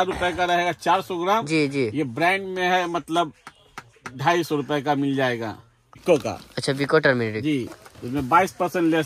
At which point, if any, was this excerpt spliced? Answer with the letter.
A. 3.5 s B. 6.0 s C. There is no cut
B